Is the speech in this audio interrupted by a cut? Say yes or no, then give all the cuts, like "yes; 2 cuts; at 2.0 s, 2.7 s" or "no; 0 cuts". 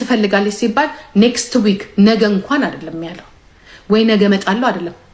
no; 0 cuts